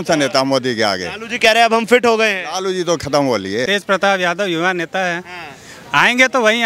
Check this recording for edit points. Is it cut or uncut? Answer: cut